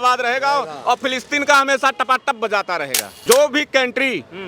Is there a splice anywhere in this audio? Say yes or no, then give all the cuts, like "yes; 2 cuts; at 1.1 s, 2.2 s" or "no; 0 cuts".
yes; 1 cut; at 3.1 s